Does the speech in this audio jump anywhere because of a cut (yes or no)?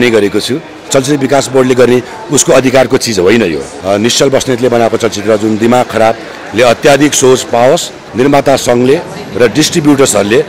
yes